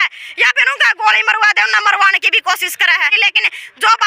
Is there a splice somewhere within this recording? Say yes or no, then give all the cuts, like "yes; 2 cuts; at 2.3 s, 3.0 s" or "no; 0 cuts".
yes; 1 cut; at 3.1 s